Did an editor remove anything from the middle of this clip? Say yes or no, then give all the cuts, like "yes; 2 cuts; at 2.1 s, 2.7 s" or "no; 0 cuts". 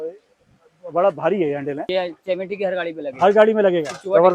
yes; 1 cut; at 1.9 s